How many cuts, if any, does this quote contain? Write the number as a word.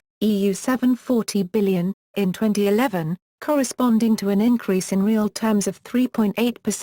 zero